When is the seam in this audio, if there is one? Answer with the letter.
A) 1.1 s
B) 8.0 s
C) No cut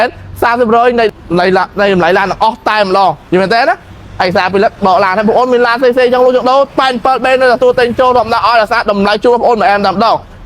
A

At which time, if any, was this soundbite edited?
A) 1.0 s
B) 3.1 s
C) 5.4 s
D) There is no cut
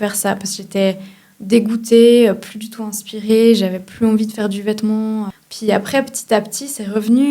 C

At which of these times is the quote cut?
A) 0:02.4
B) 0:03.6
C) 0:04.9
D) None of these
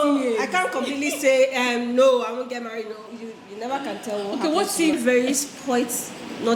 C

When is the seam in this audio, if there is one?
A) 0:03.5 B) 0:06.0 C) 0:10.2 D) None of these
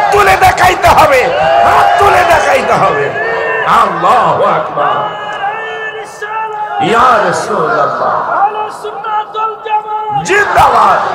D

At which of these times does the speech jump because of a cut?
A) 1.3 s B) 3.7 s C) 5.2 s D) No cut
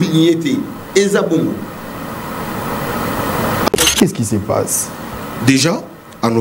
B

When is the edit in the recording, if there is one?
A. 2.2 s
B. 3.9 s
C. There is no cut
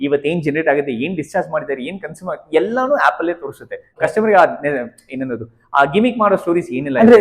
B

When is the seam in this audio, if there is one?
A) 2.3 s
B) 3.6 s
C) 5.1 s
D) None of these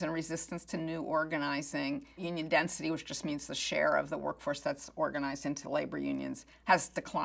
A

